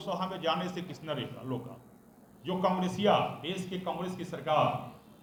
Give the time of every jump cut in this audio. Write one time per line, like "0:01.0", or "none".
none